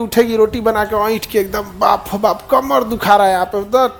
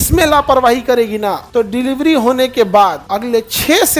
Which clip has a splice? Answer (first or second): second